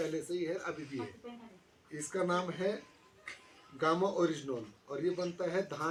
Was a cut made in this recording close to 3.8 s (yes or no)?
no